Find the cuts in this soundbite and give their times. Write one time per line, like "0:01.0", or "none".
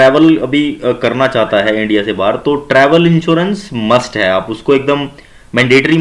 none